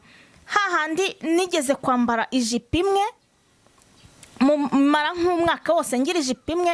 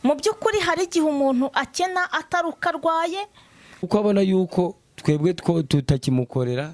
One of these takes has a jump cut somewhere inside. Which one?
second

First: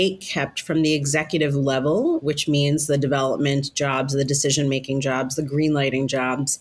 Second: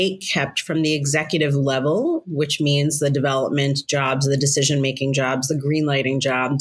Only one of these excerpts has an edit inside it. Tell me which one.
first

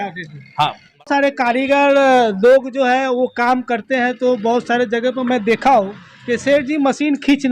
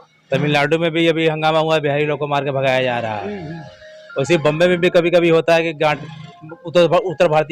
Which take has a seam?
first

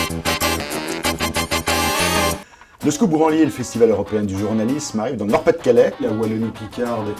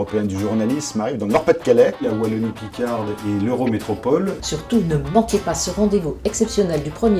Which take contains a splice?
first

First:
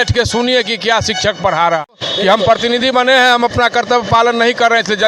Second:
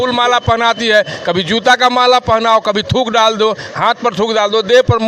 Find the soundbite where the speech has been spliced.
first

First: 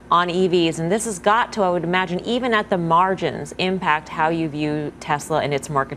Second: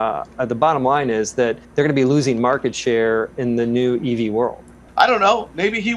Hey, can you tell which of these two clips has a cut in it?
second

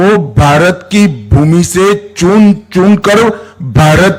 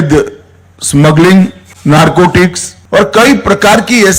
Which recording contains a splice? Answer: second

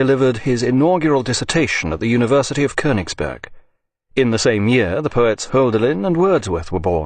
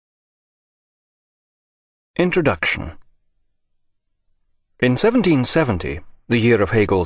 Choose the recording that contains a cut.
first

